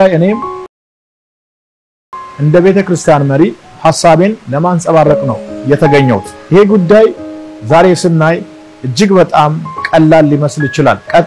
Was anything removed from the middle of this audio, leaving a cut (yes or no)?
no